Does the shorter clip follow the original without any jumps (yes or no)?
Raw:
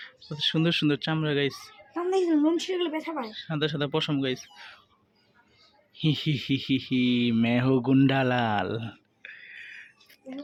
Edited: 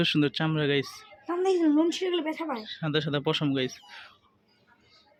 yes